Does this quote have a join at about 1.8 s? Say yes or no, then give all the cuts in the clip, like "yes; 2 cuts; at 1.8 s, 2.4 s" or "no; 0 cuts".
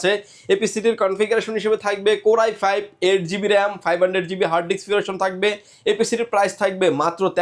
no; 0 cuts